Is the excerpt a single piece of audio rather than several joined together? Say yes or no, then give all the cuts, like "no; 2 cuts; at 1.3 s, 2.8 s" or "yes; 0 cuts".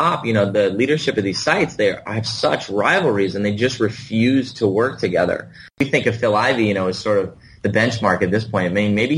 no; 1 cut; at 5.8 s